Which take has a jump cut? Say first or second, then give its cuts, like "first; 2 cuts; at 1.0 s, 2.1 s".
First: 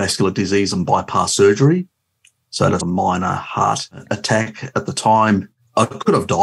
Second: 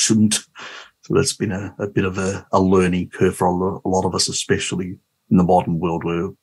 first; 2 cuts; at 4.1 s, 5.7 s